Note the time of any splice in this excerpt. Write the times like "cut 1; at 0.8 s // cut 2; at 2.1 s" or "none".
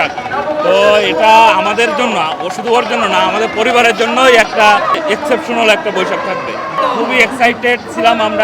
cut 1; at 6.8 s